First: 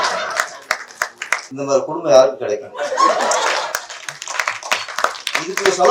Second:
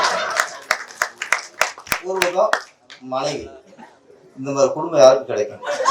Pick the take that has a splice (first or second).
first